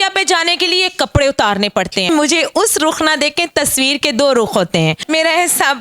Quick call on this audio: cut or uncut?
cut